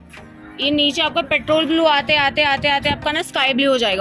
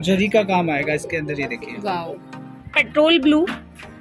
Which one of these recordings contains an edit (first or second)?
second